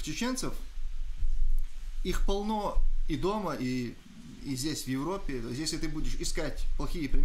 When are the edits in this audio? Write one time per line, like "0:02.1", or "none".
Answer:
none